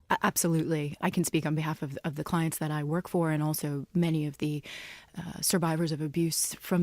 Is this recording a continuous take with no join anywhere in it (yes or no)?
no